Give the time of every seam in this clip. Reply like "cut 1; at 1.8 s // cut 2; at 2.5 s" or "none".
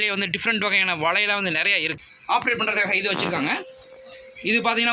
cut 1; at 1.9 s